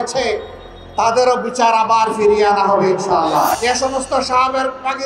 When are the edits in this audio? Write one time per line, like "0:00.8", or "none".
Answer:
0:03.6